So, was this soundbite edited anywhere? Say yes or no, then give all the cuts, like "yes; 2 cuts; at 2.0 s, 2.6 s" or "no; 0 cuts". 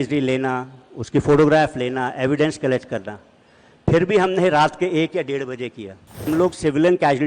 yes; 1 cut; at 6.2 s